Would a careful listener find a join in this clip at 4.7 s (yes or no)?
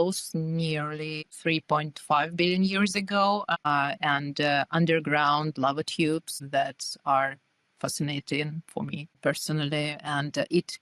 no